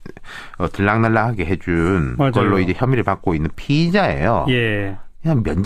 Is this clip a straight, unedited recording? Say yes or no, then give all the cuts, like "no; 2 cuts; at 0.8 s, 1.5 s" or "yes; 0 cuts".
yes; 0 cuts